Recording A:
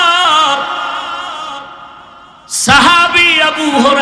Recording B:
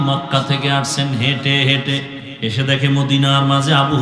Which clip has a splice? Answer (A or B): B